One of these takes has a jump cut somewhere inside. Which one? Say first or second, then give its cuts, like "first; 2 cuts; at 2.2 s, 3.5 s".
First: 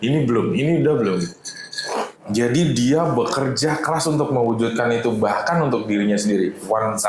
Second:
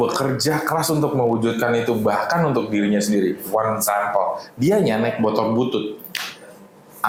first; 1 cut; at 2.1 s